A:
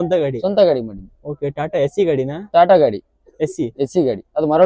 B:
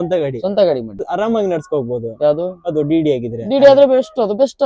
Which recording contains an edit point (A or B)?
B